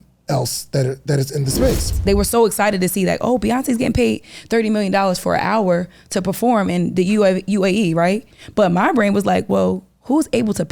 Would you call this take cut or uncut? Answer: cut